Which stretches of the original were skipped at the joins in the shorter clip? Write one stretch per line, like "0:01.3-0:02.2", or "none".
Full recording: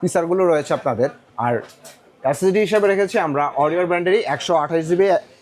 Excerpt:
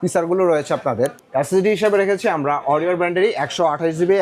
0:01.2-0:02.1